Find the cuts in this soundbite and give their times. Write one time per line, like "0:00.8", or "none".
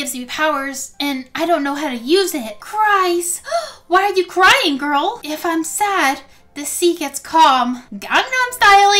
0:02.5
0:05.2